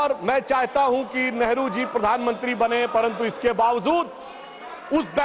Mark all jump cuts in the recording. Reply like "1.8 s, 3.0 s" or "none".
none